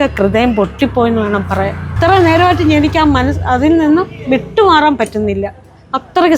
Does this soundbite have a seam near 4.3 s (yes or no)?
no